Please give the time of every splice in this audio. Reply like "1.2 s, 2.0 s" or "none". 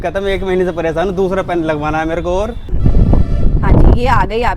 2.7 s